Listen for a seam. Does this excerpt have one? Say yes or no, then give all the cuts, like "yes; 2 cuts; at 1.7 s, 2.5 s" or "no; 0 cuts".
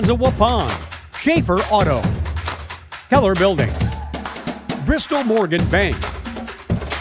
yes; 1 cut; at 6.0 s